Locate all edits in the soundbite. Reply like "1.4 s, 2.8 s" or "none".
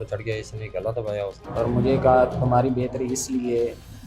1.4 s